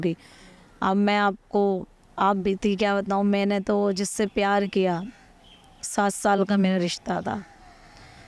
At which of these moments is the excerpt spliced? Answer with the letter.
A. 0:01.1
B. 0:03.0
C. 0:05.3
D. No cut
D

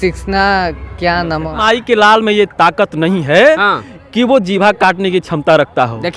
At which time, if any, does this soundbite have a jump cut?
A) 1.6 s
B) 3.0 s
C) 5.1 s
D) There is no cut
A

